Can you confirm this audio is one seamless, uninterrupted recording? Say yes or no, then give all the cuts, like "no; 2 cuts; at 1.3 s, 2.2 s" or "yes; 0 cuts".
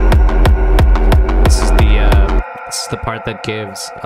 yes; 0 cuts